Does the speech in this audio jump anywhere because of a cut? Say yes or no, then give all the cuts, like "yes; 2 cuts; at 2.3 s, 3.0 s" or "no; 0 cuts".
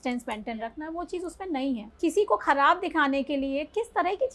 yes; 1 cut; at 1.9 s